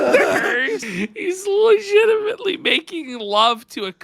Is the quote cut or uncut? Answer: cut